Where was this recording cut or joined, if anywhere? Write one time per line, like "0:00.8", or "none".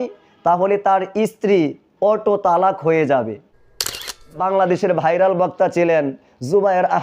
0:03.9